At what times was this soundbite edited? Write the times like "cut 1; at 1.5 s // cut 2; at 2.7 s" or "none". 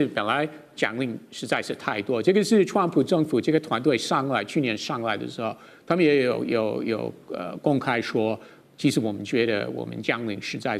none